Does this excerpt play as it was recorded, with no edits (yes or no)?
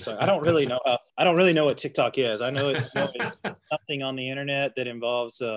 no